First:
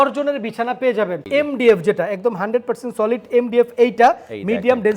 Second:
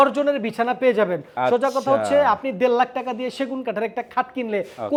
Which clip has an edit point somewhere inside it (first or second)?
first